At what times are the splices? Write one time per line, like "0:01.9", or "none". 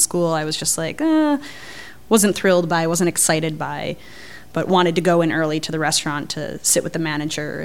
none